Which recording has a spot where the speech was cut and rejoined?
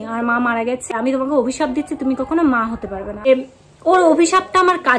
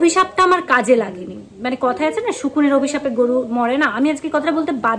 first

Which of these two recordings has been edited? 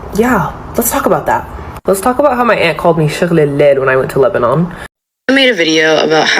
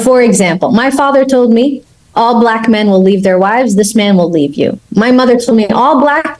first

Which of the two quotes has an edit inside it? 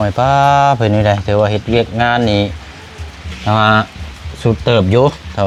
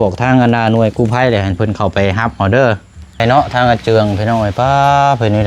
second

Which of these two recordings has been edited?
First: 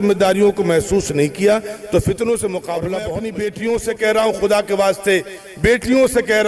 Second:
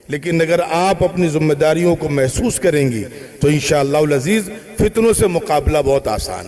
first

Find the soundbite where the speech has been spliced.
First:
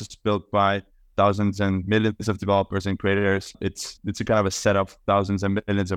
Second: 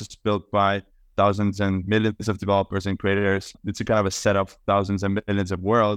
second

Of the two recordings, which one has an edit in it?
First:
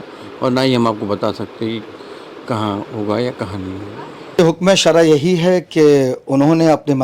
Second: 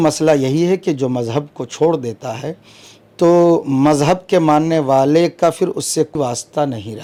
first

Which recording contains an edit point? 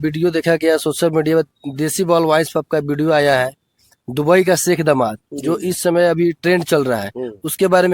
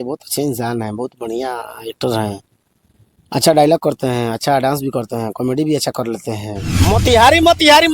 second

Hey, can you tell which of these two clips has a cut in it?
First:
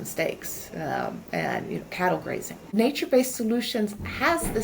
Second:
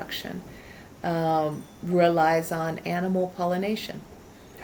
first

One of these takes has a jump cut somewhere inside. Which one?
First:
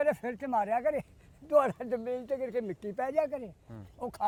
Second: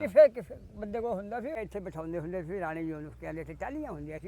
second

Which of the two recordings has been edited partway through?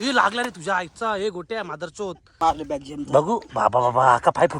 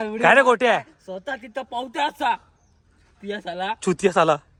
first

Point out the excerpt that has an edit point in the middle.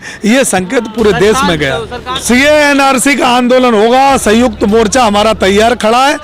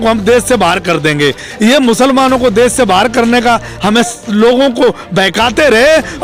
first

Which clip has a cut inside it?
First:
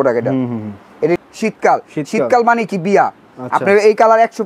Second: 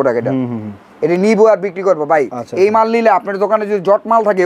first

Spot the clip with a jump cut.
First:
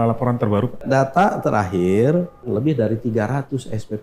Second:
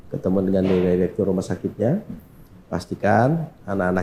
first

